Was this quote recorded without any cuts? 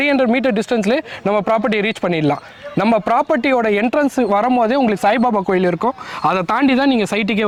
yes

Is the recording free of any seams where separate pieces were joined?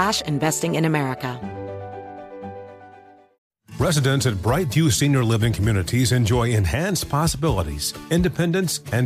no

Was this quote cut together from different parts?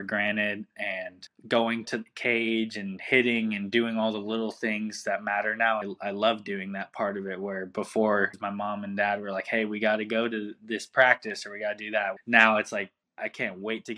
yes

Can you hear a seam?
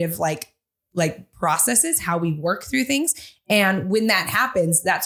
no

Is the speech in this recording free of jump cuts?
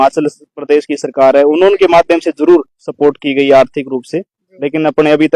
yes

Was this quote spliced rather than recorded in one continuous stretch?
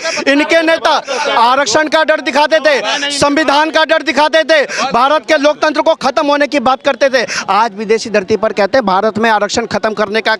no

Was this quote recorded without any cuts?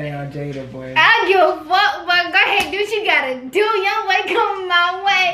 yes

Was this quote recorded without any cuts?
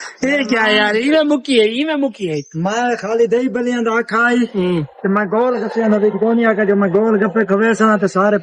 yes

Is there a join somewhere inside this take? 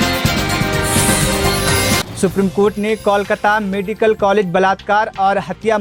no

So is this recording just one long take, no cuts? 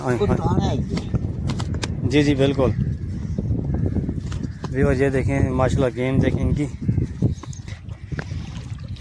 no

